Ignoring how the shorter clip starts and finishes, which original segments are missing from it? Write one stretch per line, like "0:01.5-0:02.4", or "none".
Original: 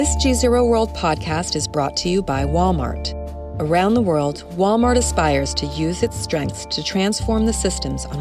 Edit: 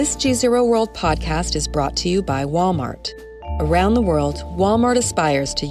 none